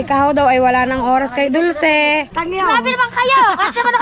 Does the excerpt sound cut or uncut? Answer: cut